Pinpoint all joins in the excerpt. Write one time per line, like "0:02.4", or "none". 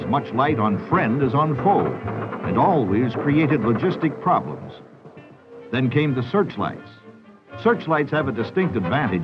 0:05.6

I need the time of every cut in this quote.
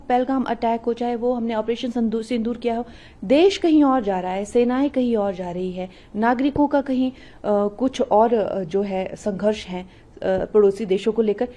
none

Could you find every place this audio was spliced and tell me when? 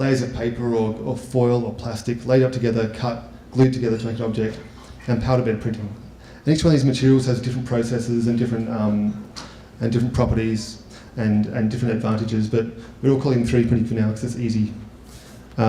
0:01.0

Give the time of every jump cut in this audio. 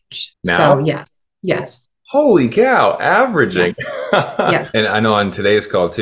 0:04.7

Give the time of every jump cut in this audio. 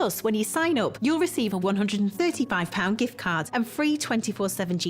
0:00.9
0:03.5

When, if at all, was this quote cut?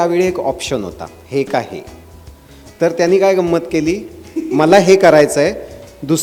none

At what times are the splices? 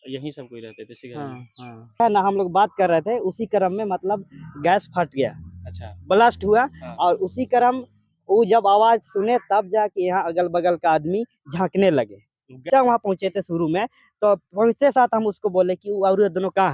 0:02.0
0:12.7

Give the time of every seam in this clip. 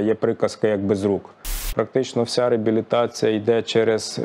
0:01.7

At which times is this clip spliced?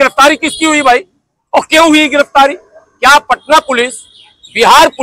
none

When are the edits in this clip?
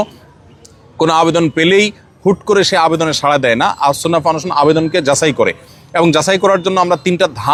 none

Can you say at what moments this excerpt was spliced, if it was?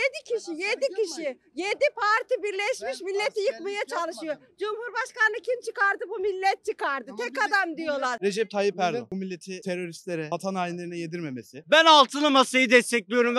0:08.2
0:09.1
0:11.6

